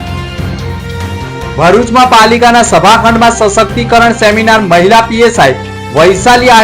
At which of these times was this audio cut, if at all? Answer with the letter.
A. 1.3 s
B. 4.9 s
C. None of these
A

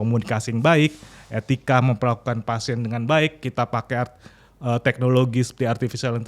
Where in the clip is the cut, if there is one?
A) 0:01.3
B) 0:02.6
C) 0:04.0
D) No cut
D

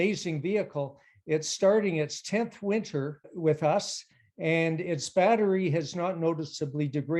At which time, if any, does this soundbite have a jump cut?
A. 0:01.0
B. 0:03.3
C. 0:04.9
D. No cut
B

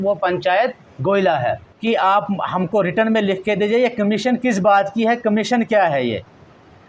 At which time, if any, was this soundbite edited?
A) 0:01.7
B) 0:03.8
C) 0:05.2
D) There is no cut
A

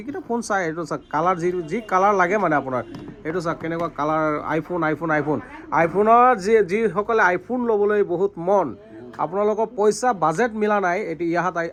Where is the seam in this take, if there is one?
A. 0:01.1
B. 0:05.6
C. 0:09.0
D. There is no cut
D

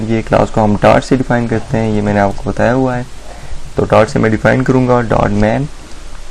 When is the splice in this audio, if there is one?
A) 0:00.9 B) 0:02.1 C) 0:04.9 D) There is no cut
B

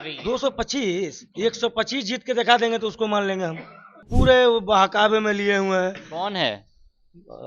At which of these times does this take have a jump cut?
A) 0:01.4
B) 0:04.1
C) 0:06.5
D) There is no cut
B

